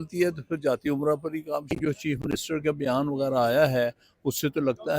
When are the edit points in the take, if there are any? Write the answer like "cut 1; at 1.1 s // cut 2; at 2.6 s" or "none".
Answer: cut 1; at 1.7 s